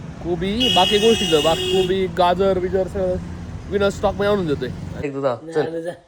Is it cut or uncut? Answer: cut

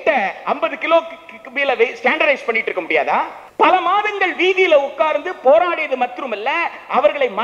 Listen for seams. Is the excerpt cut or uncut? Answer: cut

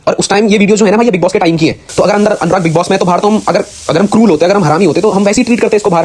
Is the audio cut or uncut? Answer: cut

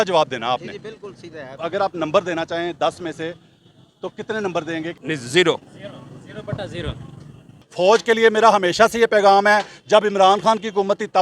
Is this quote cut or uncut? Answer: cut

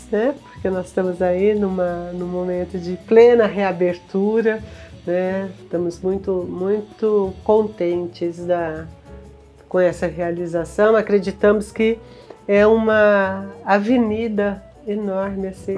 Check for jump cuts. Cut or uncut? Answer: uncut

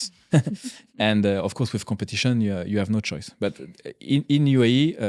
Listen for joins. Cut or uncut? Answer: uncut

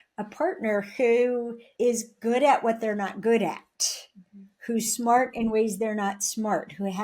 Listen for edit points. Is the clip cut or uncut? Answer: cut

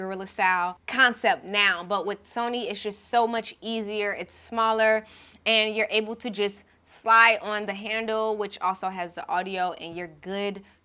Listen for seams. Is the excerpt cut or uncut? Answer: uncut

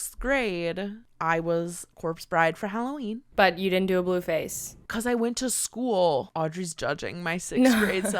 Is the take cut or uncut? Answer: cut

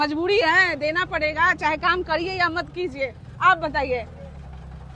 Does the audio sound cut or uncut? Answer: uncut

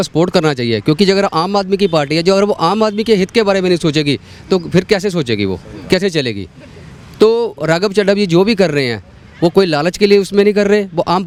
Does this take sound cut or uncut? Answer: uncut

